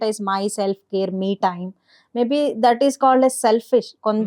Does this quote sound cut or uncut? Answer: uncut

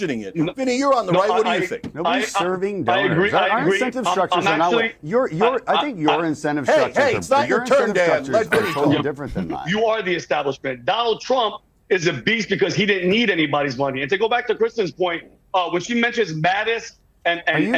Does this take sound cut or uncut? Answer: cut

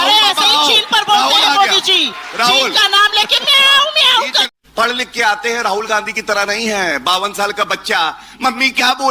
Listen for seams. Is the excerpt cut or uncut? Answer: cut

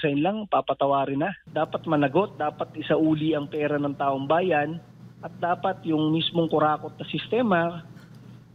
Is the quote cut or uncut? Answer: cut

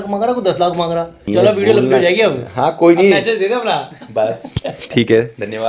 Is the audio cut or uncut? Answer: uncut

